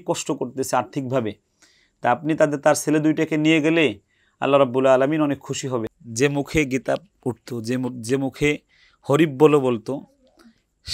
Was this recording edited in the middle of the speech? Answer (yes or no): yes